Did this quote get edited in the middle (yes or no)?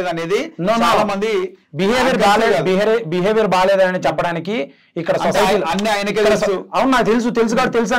no